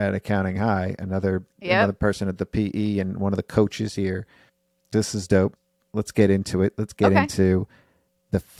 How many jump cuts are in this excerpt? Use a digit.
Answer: 0